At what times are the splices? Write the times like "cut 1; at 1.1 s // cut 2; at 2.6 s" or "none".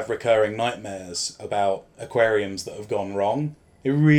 none